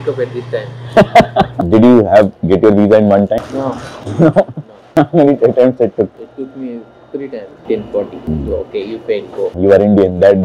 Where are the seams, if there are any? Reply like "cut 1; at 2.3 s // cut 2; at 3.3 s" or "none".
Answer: cut 1; at 1.5 s // cut 2; at 3.4 s // cut 3; at 7.6 s